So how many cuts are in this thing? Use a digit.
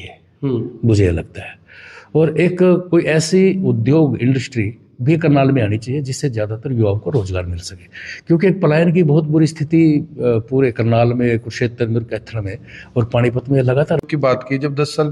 1